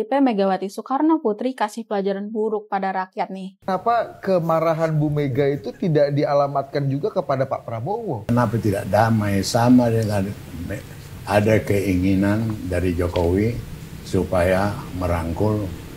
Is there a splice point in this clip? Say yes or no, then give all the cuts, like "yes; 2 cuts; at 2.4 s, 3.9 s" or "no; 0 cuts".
yes; 2 cuts; at 3.6 s, 8.2 s